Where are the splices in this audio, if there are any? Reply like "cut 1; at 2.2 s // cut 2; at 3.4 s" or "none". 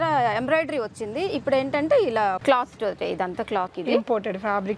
cut 1; at 2.4 s // cut 2; at 3.7 s